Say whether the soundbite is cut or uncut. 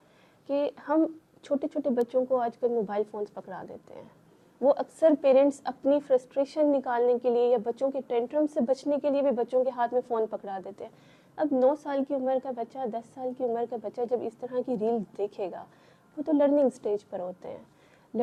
uncut